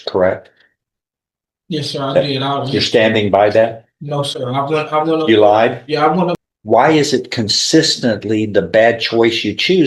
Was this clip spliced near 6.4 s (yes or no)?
yes